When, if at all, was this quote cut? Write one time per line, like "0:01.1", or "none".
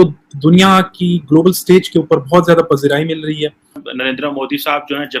0:03.8

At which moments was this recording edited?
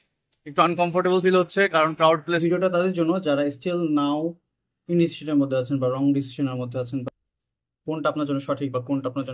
0:02.4
0:07.0

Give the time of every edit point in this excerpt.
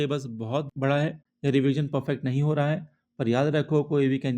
0:01.3

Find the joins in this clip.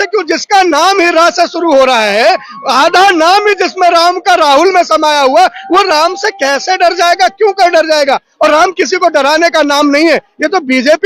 0:08.3

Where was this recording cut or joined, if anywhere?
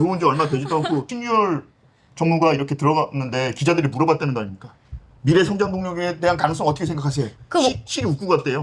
0:01.1

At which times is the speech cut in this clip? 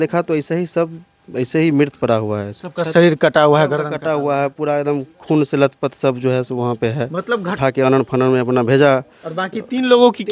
0:07.6

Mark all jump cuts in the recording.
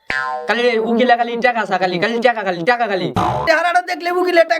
0:03.4

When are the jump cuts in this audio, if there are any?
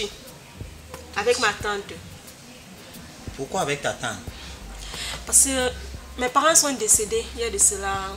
none

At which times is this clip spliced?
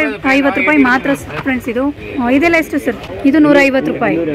0:02.0
0:03.1

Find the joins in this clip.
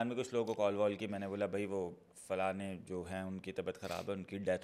none

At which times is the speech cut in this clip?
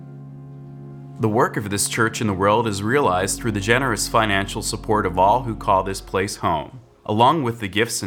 0:01.2

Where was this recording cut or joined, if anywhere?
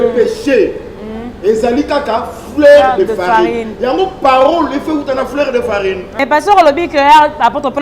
0:06.2

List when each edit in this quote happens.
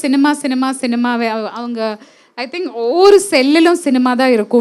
none

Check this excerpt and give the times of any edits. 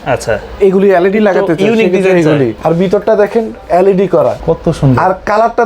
0:02.6
0:04.4

